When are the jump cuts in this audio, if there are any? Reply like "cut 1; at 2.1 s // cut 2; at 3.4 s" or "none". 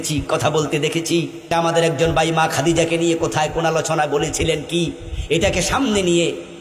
cut 1; at 1.5 s